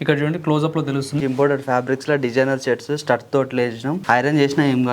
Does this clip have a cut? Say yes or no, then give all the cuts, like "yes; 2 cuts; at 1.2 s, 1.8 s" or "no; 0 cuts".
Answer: yes; 2 cuts; at 1.2 s, 4.0 s